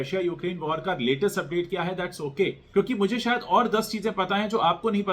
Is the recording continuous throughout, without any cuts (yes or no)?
no